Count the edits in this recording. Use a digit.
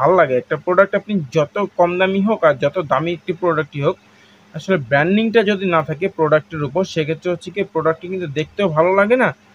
0